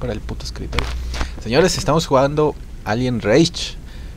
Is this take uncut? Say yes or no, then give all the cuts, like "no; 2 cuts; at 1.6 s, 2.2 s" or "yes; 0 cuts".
yes; 0 cuts